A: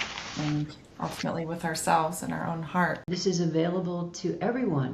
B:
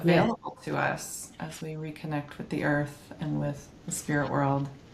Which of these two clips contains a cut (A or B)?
A